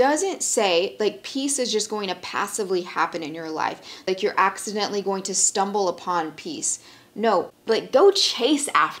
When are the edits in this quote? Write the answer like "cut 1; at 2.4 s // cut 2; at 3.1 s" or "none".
cut 1; at 4.1 s // cut 2; at 7.5 s